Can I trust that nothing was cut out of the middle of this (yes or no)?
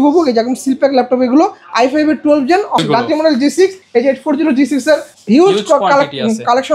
no